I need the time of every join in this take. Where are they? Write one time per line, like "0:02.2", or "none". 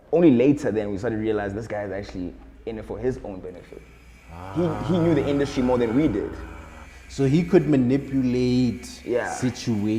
none